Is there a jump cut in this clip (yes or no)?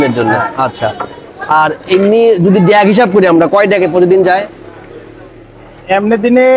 no